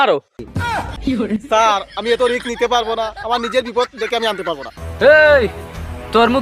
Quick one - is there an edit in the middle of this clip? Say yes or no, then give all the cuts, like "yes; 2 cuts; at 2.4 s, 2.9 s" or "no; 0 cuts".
yes; 1 cut; at 4.7 s